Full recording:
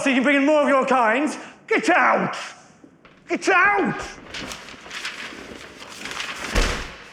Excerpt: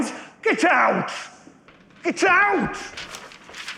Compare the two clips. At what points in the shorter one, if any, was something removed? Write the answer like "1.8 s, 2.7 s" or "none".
2.8 s

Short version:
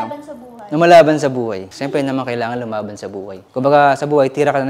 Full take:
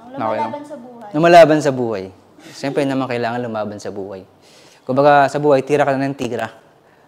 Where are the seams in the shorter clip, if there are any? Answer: 1.7 s, 3.4 s

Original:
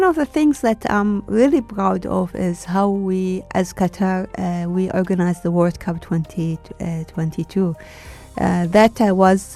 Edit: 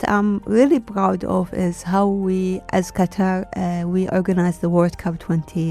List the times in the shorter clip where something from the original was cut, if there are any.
none

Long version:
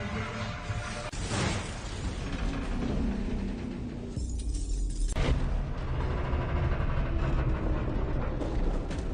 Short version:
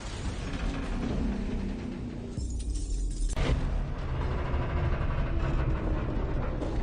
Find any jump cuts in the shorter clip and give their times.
none

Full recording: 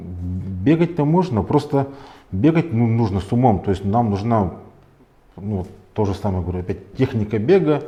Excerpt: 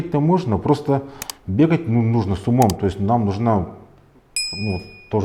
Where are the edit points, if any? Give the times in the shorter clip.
none

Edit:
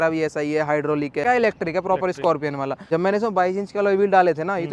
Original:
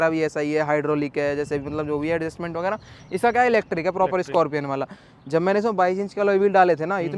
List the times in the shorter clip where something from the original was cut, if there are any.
1.2 s, 2.8 s

